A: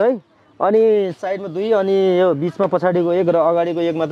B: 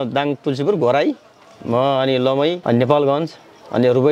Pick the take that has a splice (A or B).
B